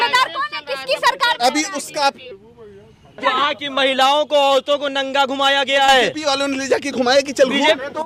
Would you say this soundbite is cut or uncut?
uncut